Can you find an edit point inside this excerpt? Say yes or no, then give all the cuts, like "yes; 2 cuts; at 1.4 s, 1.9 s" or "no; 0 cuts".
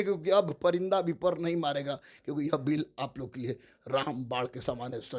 no; 0 cuts